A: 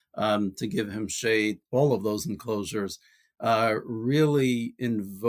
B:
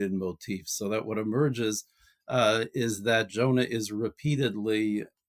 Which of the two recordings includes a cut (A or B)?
A